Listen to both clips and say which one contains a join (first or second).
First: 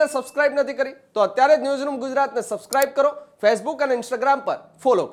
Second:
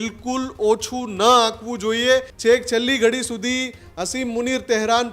second